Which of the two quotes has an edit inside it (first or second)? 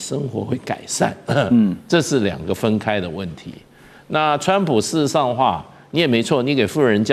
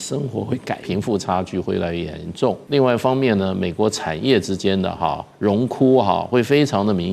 second